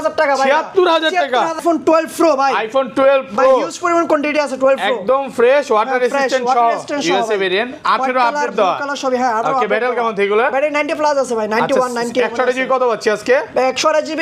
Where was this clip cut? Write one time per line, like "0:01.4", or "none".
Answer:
0:01.6